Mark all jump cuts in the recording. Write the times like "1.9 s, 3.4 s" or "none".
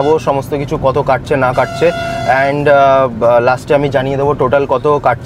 none